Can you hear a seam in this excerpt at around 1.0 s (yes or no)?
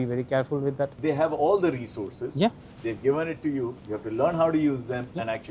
yes